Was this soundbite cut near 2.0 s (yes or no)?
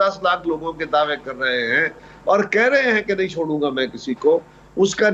no